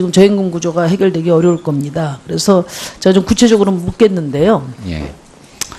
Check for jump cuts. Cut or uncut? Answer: uncut